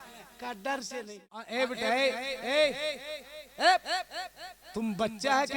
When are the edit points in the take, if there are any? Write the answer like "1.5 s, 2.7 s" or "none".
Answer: 1.5 s